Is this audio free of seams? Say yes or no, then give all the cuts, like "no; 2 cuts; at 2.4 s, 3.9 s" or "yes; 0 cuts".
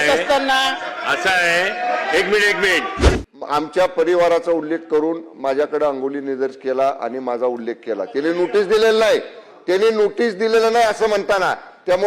no; 1 cut; at 3.1 s